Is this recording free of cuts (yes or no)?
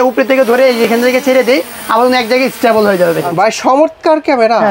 no